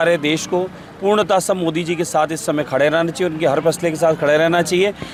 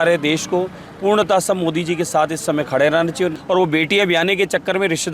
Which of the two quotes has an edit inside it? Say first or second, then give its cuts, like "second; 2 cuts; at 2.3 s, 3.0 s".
second; 1 cut; at 3.3 s